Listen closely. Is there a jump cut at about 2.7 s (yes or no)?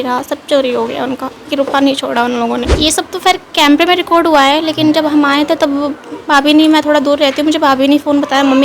yes